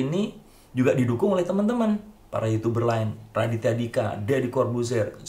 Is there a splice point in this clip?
no; 0 cuts

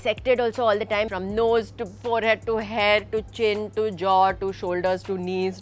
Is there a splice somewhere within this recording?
yes; 1 cut; at 1.1 s

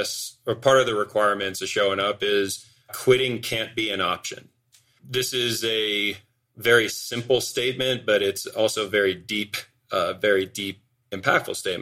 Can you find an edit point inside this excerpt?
yes; 2 cuts; at 2.9 s, 4.8 s

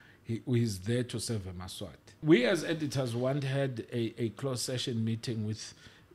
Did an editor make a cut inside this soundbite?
yes; 1 cut; at 2.2 s

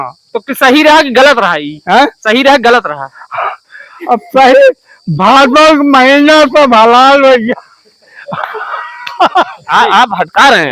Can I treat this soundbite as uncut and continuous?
no; 1 cut; at 9.6 s

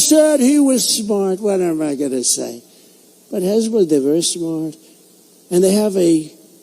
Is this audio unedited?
no; 1 cut; at 5.7 s

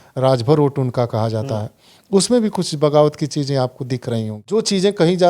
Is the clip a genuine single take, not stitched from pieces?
no; 1 cut; at 4.4 s

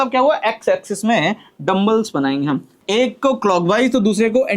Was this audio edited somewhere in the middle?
yes; 1 cut; at 2.8 s

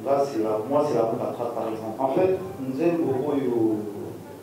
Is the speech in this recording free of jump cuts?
no; 1 cut; at 1.9 s

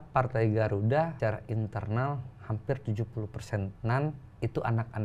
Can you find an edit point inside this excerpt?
yes; 2 cuts; at 1.1 s, 3.7 s

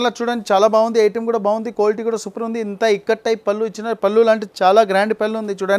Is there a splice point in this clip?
no; 0 cuts

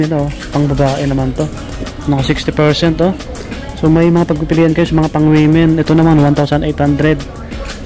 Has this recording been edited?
no; 0 cuts

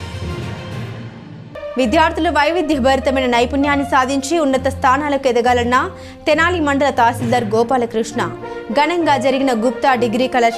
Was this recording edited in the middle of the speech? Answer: yes; 1 cut; at 1.1 s

